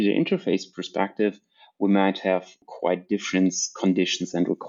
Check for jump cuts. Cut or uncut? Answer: uncut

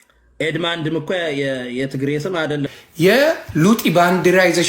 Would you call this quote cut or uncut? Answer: cut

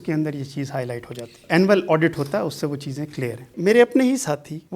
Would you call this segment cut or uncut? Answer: cut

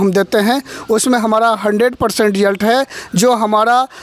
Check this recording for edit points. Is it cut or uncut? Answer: uncut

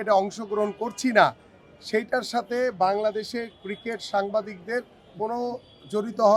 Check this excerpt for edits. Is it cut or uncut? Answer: uncut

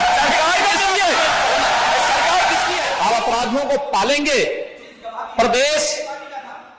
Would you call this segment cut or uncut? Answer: cut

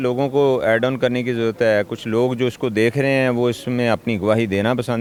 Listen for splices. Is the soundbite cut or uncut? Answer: uncut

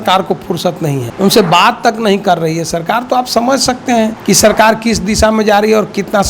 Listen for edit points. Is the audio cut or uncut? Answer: cut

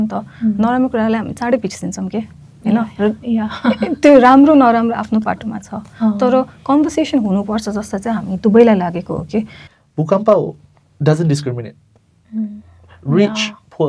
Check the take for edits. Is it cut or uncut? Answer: cut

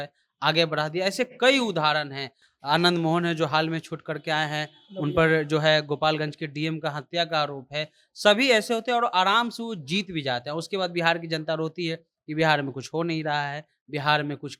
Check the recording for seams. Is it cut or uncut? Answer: uncut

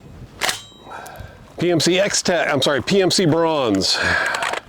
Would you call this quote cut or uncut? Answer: cut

